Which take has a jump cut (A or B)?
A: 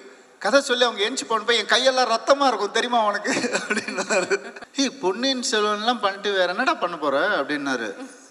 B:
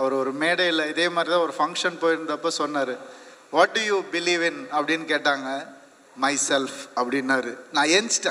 A